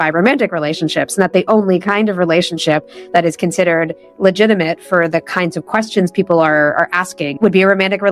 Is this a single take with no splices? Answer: yes; 0 cuts

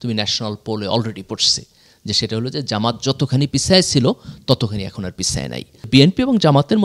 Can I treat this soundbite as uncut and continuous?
no; 1 cut; at 5.9 s

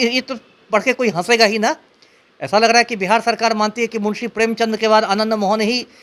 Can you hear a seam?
no; 0 cuts

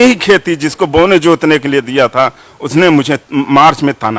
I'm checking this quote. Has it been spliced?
no; 0 cuts

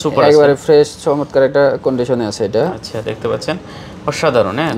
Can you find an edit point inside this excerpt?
no; 0 cuts

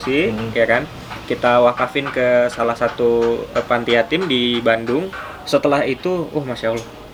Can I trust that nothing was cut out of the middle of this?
yes; 0 cuts

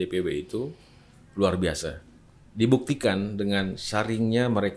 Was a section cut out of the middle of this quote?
no; 0 cuts

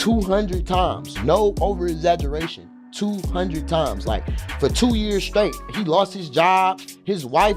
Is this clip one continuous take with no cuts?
yes; 0 cuts

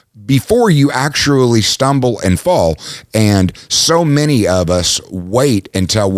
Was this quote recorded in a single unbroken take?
yes; 0 cuts

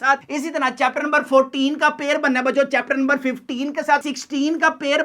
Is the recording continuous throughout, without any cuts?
no; 1 cut; at 4.0 s

